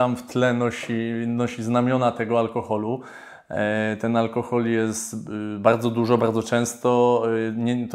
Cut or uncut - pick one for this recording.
uncut